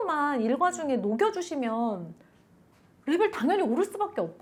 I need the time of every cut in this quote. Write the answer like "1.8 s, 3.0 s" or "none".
none